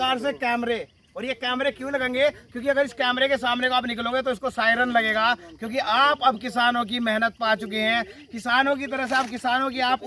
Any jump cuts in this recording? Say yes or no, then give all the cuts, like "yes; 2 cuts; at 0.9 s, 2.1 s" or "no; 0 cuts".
no; 0 cuts